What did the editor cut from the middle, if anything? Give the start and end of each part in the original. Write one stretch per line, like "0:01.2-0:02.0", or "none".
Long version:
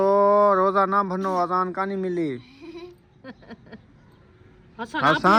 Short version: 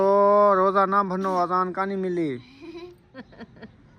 0:03.0-0:03.1